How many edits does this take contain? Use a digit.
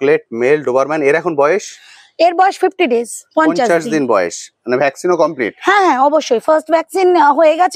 0